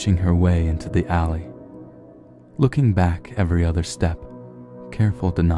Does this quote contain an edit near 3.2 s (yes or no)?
no